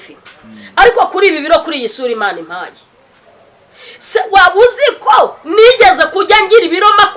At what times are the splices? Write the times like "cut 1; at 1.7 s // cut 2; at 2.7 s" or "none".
none